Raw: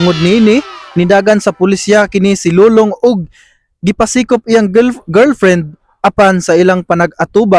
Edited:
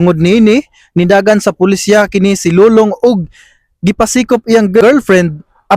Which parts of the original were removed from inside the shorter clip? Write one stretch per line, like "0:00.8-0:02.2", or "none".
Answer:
0:04.8-0:05.1